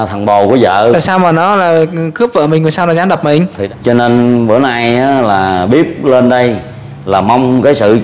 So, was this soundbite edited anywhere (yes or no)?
yes